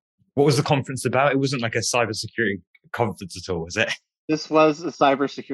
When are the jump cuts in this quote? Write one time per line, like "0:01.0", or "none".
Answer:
none